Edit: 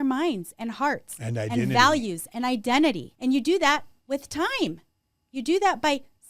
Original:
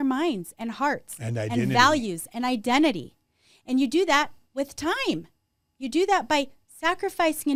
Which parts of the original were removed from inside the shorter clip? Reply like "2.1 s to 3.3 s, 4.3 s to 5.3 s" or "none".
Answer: 3.1 s to 3.5 s